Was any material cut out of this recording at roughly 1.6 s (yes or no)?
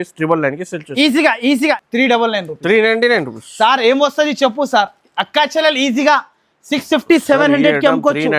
yes